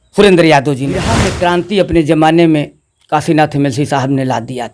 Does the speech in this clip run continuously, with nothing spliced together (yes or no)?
no